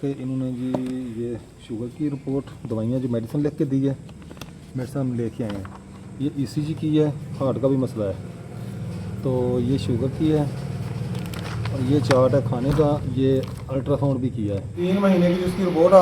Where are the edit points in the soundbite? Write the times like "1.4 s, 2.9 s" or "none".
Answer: 14.8 s